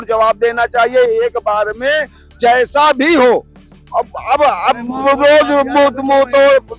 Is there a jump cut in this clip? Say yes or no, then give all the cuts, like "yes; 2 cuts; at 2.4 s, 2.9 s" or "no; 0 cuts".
no; 0 cuts